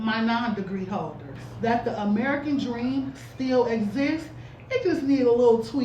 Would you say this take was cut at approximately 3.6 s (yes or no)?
no